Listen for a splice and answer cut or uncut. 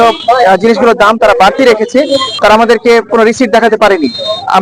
cut